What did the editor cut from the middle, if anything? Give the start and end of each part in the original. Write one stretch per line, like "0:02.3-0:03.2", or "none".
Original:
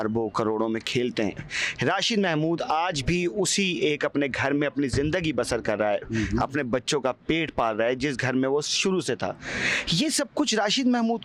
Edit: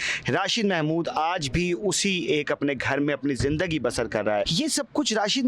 0:06.0-0:09.9